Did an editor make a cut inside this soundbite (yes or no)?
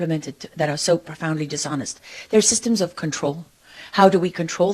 no